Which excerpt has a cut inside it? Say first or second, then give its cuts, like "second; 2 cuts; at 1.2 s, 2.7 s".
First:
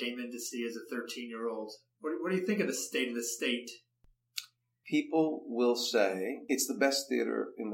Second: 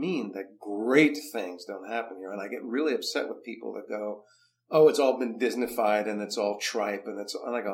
first; 2 cuts; at 4.1 s, 6.4 s